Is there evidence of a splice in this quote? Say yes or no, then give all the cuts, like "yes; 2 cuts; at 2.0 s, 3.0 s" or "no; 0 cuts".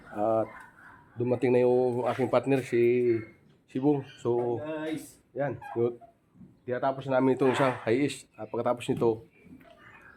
no; 0 cuts